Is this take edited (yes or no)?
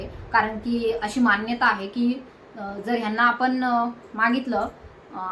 no